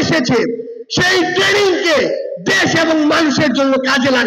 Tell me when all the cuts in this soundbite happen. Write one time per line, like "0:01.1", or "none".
none